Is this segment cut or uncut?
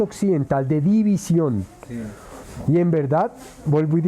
uncut